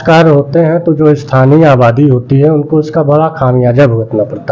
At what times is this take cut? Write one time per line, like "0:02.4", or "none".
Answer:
none